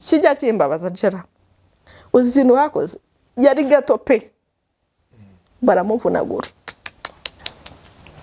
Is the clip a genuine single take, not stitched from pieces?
yes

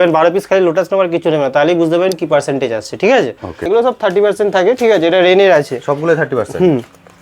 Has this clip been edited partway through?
yes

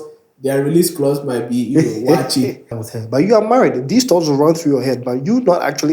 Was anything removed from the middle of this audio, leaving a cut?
yes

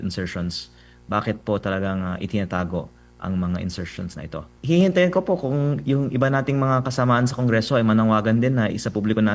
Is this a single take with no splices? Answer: no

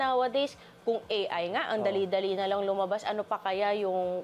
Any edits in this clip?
no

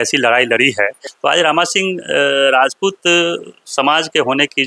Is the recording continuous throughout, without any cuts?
no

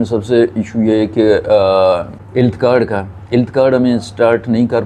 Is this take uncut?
no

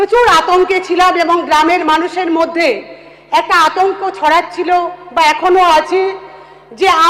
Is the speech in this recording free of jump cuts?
yes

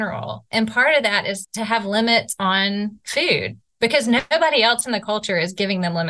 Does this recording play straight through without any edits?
no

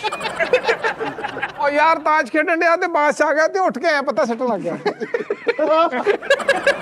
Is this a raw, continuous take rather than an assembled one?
no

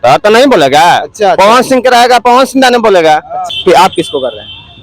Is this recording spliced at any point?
yes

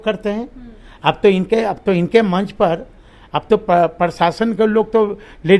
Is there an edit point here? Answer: no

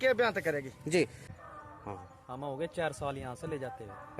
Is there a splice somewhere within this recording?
yes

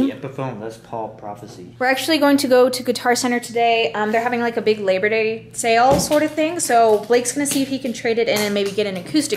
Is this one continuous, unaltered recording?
no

